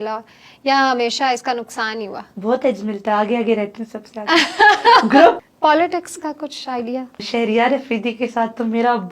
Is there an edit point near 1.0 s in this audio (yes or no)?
no